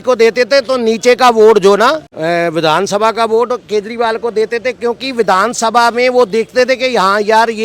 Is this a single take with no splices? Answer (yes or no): no